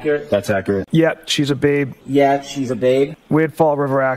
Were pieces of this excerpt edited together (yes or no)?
yes